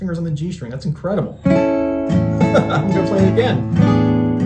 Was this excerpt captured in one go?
yes; 0 cuts

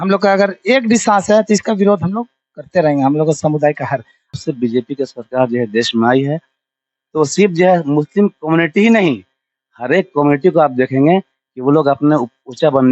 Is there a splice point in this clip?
yes; 1 cut; at 4.4 s

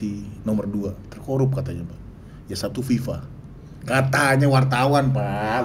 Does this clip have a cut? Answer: no; 0 cuts

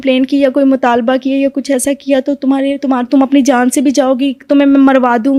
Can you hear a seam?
no; 0 cuts

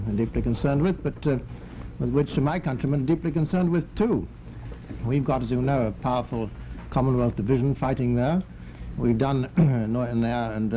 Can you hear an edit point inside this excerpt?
no; 0 cuts

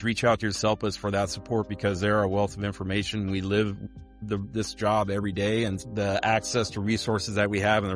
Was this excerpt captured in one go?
no; 1 cut; at 5.8 s

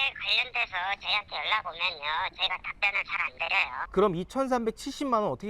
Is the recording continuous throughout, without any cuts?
no; 1 cut; at 3.8 s

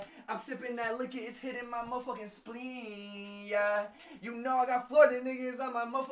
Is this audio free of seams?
yes; 0 cuts

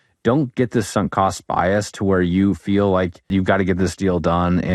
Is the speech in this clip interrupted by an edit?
yes; 1 cut; at 3.3 s

